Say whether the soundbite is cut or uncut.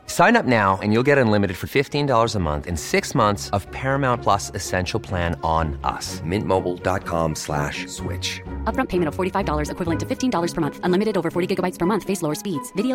uncut